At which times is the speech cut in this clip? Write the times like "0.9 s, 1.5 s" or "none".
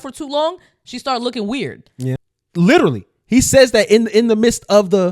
2.1 s